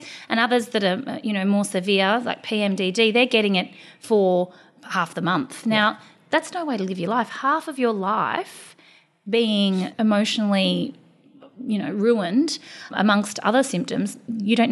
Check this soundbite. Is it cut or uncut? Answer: cut